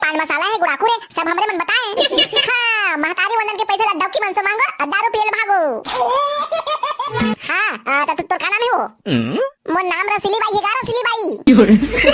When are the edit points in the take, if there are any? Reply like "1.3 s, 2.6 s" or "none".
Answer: 7.2 s

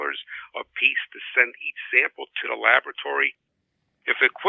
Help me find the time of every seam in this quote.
3.5 s

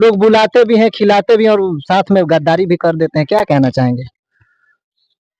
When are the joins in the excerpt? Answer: none

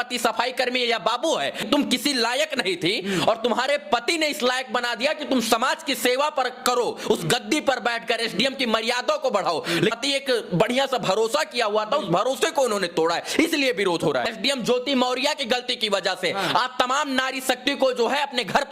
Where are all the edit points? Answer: 1.6 s, 10.0 s, 14.3 s

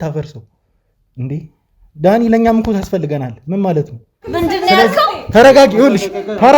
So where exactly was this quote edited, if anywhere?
4.2 s

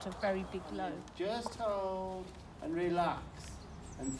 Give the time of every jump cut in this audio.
1.0 s

